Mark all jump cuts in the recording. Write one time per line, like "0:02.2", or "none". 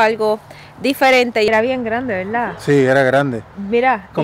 0:01.5